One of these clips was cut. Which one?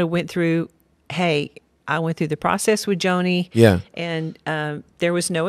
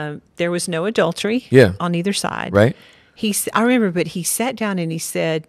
second; 1 cut; at 2.8 s

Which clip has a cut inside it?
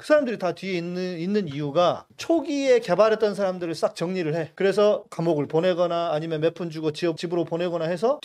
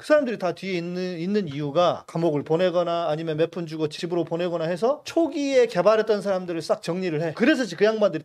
second; 4 cuts; at 2.1 s, 3.9 s, 5.0 s, 7.3 s

